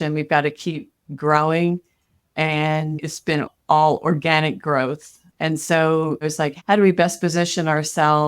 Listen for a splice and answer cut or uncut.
cut